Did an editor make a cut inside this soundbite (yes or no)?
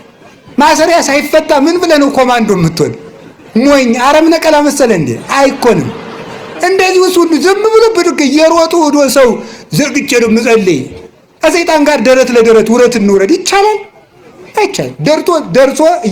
no